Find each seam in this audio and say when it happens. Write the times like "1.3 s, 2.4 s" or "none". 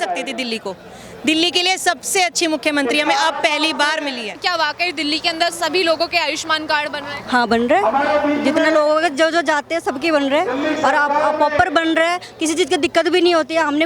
4.4 s